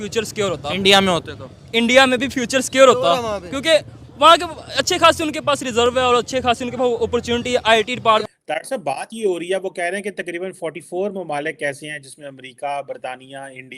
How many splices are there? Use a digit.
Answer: 1